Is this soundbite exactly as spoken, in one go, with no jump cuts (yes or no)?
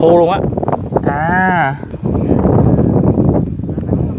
no